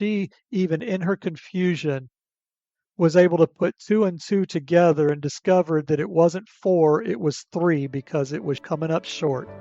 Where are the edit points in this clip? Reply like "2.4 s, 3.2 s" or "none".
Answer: 8.6 s